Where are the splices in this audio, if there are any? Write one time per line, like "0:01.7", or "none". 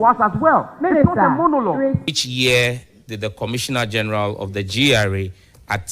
0:02.0

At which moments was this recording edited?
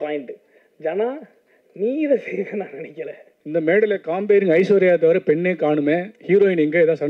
0:03.3

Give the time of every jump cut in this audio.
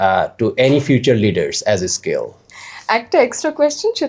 none

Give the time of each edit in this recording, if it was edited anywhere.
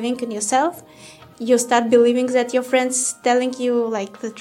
none

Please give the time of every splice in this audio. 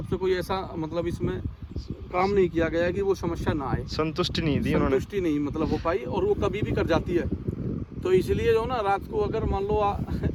none

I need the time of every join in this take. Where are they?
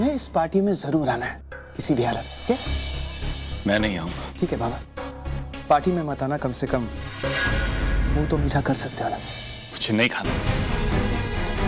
0:04.2

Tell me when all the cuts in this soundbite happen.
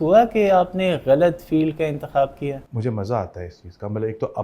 0:02.7

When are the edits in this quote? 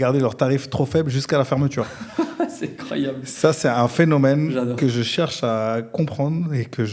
none

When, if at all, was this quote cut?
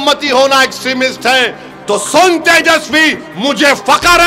none

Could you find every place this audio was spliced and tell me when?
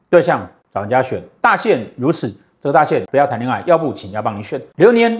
0:03.0

